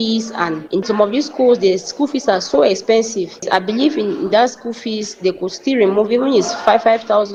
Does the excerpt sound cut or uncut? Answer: uncut